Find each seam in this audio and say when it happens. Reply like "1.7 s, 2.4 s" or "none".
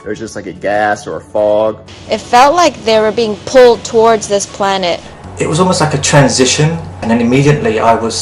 1.9 s, 7.0 s